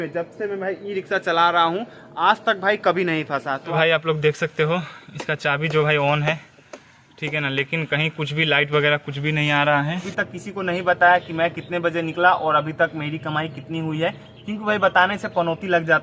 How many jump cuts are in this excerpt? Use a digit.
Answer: 2